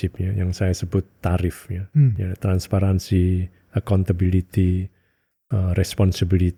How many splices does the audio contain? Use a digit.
0